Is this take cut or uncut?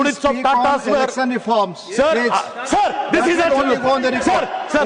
uncut